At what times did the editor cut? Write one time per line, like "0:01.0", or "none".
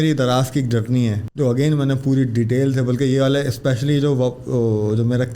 0:01.2